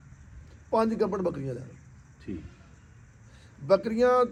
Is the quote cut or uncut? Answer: uncut